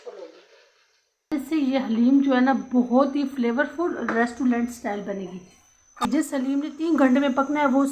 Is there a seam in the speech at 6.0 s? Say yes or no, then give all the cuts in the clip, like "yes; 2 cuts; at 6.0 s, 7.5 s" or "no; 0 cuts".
yes; 2 cuts; at 1.3 s, 6.0 s